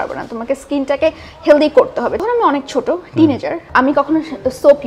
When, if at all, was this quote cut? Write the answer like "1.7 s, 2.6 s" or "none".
2.2 s, 3.6 s